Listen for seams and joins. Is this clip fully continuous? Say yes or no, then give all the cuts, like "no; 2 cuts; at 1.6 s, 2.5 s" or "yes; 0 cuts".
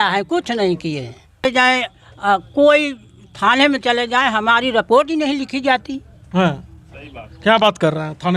no; 1 cut; at 1.4 s